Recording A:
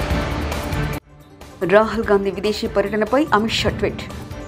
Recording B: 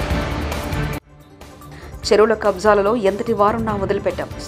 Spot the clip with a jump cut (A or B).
B